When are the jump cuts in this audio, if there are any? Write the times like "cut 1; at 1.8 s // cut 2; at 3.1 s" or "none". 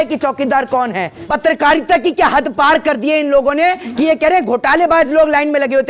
cut 1; at 1.2 s